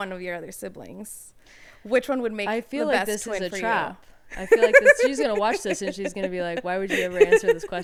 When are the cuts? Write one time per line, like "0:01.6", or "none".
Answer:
none